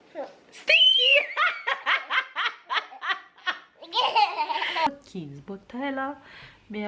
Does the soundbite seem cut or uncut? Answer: cut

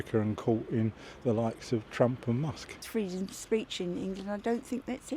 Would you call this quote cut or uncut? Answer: cut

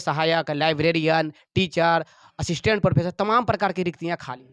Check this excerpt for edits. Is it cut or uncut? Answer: uncut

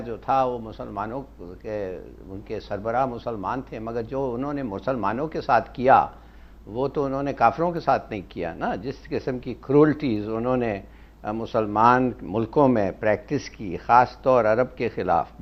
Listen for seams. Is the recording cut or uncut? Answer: uncut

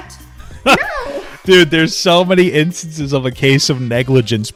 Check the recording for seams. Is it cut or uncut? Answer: uncut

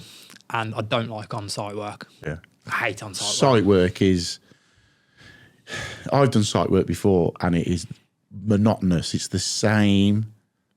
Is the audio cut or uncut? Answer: uncut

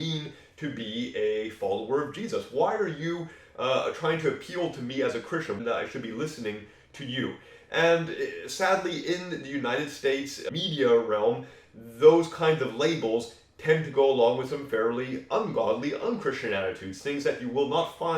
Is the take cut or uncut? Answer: cut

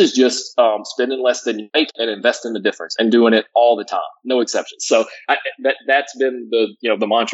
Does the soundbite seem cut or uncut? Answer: cut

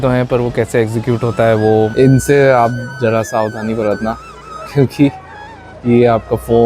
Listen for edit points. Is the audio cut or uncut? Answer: cut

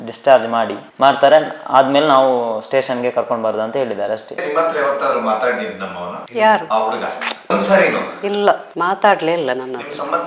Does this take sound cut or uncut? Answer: uncut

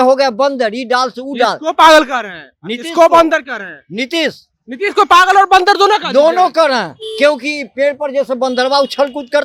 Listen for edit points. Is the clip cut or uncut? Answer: uncut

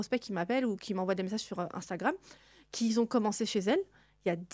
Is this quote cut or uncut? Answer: uncut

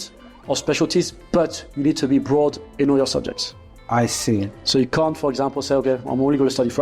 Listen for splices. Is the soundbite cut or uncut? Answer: uncut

